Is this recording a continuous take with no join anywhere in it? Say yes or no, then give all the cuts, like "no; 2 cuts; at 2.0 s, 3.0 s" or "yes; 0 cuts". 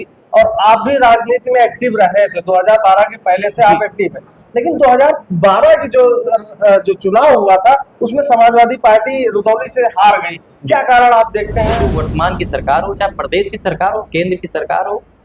no; 1 cut; at 11.9 s